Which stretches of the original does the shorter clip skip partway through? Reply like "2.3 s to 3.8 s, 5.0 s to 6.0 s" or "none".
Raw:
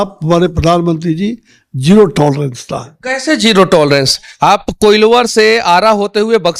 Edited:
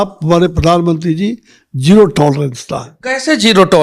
none